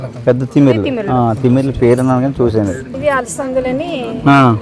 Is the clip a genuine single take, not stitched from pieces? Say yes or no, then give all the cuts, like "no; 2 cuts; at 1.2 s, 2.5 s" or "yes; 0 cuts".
no; 1 cut; at 2.9 s